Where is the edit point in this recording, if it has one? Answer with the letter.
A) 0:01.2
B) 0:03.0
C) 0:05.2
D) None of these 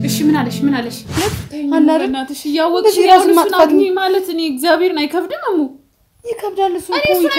A